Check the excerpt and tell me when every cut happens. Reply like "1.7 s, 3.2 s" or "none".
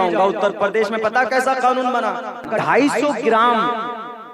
2.5 s